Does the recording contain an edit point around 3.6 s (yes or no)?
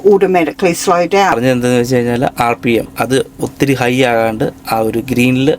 no